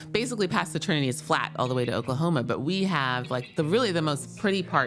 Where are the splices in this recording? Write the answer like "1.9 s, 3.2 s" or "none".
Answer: none